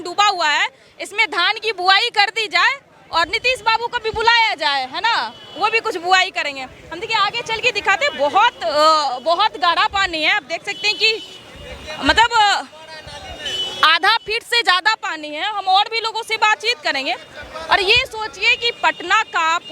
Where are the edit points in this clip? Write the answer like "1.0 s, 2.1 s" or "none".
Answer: none